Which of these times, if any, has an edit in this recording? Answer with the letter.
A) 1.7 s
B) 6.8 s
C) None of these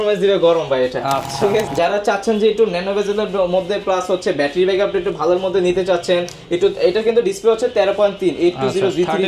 A